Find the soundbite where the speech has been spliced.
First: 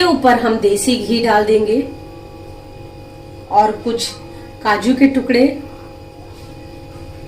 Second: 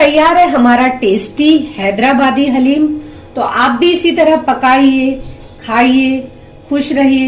first; 2 cuts; at 2.9 s, 6.3 s

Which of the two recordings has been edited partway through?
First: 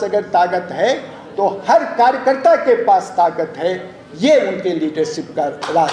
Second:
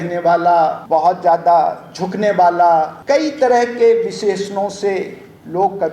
second; 2 cuts; at 0.8 s, 2.9 s

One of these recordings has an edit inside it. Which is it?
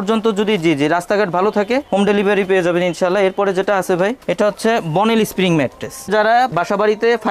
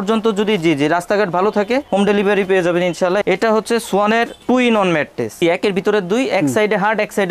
second; 2 cuts; at 3.2 s, 5.4 s

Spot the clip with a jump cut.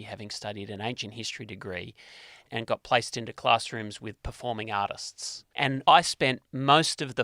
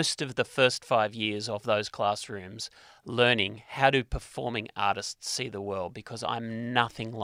first; 2 cuts; at 2.4 s, 5.7 s

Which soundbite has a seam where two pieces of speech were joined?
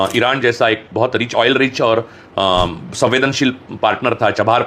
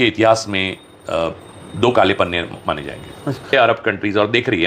second; 1 cut; at 3.5 s

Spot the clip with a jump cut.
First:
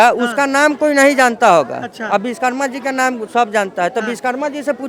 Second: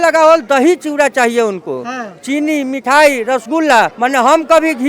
second; 1 cut; at 3.9 s

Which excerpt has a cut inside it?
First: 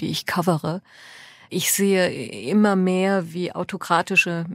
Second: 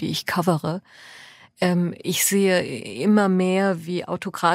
first; 1 cut; at 1.4 s

